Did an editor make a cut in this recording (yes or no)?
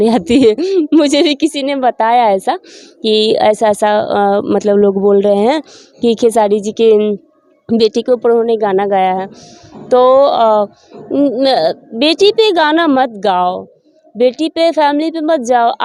no